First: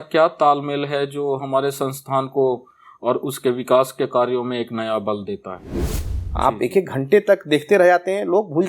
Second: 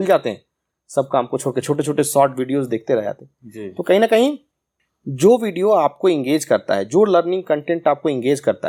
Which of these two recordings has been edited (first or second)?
first